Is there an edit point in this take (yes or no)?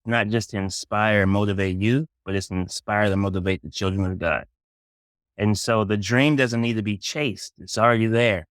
no